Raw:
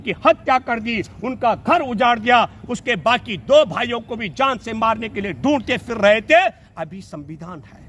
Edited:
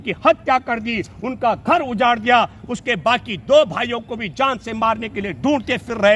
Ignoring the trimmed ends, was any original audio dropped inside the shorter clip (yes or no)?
no